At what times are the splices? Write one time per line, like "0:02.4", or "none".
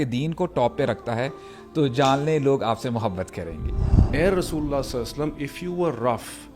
0:04.0